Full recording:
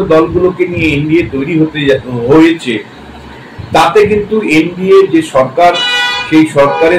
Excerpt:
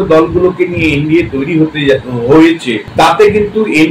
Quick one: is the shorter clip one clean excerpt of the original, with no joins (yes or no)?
no